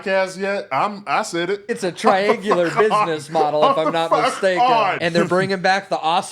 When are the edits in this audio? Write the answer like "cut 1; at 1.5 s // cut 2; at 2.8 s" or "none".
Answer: cut 1; at 1.7 s // cut 2; at 5.0 s